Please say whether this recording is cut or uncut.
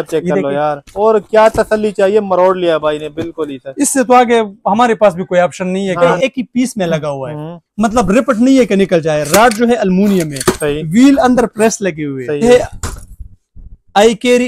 cut